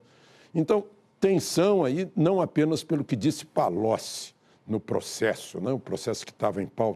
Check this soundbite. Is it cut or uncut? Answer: cut